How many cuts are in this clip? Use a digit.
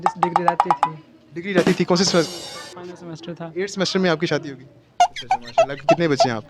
0